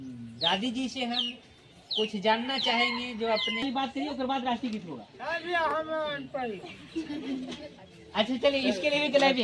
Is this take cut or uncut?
cut